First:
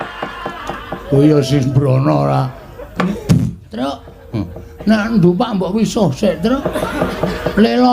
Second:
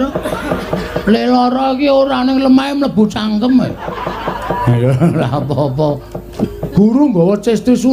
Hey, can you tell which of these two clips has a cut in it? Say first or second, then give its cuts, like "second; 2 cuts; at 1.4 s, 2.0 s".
first; 1 cut; at 3.1 s